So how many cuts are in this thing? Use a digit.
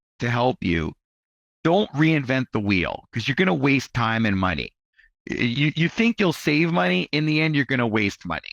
0